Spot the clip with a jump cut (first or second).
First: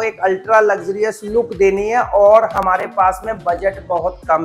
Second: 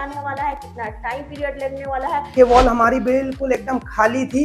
second